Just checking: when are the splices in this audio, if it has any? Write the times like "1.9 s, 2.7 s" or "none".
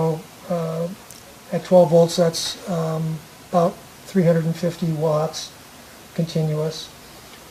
none